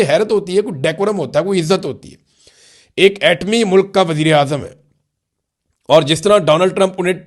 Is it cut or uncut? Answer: uncut